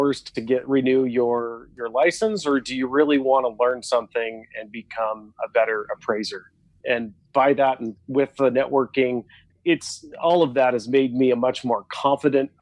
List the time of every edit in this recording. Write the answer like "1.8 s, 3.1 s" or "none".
7.9 s, 9.5 s